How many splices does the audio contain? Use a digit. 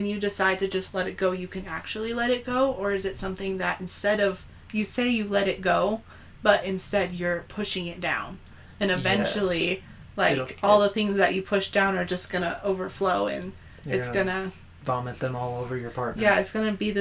0